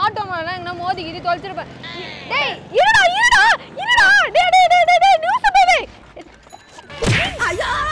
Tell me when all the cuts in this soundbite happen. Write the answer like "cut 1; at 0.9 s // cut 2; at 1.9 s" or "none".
cut 1; at 5.8 s